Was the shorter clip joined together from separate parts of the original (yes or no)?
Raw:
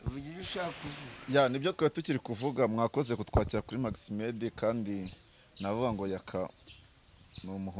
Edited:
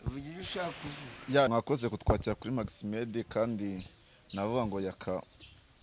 yes